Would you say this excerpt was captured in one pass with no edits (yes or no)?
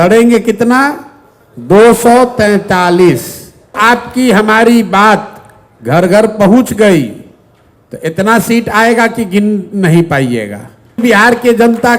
no